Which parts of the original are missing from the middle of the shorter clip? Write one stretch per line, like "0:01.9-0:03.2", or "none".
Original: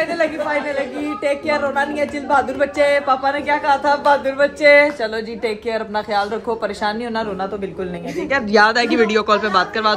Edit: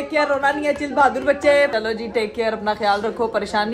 0:03.0-0:05.0